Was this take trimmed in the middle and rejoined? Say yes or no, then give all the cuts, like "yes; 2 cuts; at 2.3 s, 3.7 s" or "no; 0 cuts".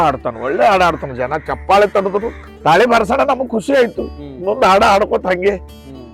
yes; 1 cut; at 2.4 s